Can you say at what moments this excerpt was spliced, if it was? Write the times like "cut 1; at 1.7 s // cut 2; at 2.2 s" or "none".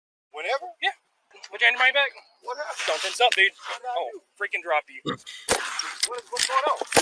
cut 1; at 1.4 s // cut 2; at 5.3 s